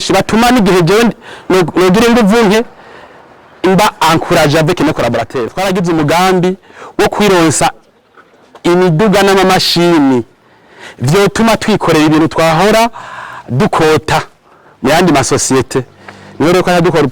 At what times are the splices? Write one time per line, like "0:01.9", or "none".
0:05.5